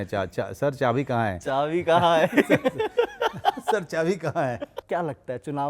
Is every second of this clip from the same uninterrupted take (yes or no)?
no